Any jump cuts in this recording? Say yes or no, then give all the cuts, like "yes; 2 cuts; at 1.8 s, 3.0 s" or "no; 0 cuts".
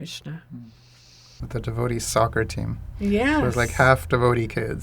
yes; 1 cut; at 1.4 s